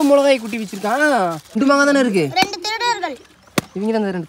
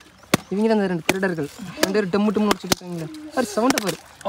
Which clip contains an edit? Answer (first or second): first